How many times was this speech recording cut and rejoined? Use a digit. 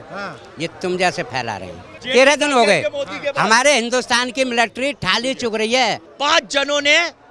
2